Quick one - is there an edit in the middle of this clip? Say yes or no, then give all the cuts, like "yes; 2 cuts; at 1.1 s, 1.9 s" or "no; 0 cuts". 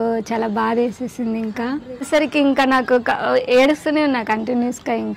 yes; 1 cut; at 2.1 s